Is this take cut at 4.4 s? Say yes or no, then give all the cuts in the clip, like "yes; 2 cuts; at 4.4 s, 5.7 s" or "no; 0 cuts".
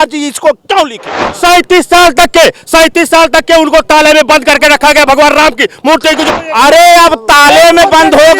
no; 2 cuts; at 1.3 s, 6.2 s